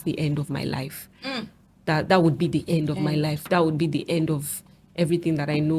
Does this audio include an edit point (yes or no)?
no